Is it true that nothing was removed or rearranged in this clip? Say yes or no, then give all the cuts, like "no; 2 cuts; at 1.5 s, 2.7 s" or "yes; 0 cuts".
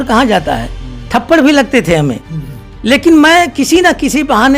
yes; 0 cuts